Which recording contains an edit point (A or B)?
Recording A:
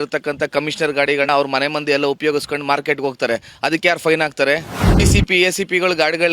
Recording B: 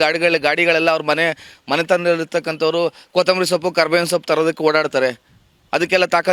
A